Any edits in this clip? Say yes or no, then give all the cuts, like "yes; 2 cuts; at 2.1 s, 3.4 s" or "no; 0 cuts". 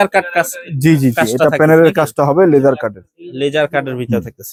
no; 0 cuts